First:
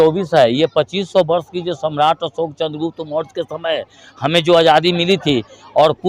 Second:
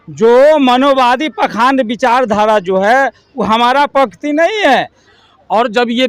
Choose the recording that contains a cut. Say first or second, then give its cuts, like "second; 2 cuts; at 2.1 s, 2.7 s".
second; 1 cut; at 5.1 s